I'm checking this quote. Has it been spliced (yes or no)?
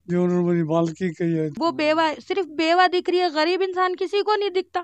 yes